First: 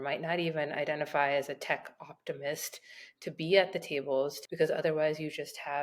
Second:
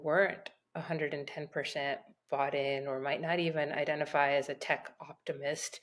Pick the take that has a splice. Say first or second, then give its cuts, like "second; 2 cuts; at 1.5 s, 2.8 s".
first; 1 cut; at 4.4 s